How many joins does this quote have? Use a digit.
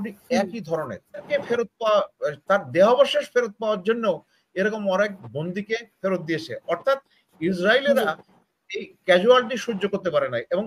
1